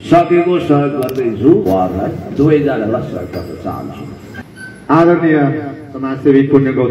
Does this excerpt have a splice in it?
no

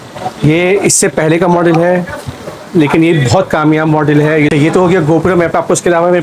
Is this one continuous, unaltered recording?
no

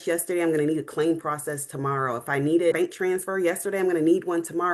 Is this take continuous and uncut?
no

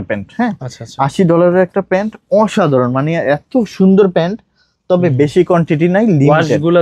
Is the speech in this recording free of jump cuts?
yes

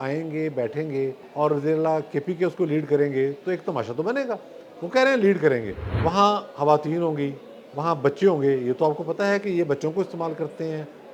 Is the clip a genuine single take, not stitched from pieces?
no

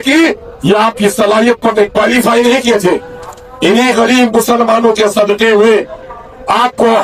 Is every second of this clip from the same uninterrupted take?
yes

